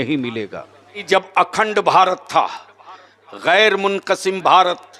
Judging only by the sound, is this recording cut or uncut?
cut